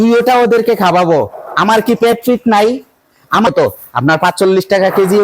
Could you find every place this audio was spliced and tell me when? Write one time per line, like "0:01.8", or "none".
0:03.5

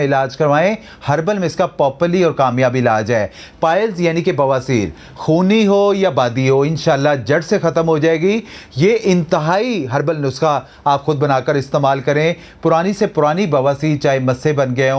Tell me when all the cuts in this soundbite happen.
none

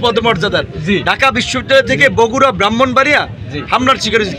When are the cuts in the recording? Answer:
none

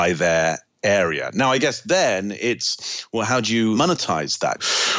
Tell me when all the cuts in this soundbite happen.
0:03.8

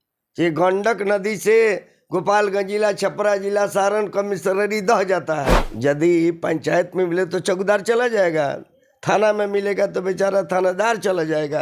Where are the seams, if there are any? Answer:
0:05.6

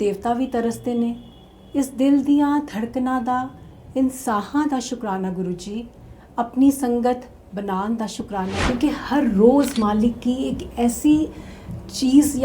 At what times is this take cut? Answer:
0:08.6

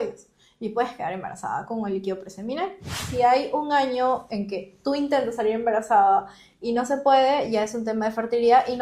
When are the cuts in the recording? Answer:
0:03.0

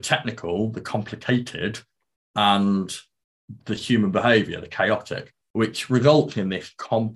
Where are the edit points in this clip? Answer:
none

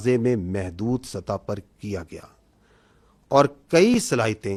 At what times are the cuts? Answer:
none

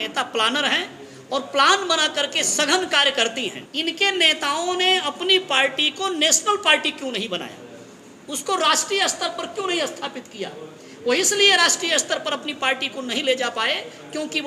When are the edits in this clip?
0:03.6

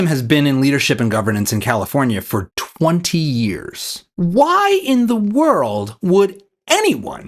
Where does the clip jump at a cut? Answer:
0:04.1

